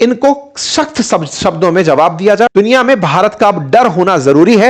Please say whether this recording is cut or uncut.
cut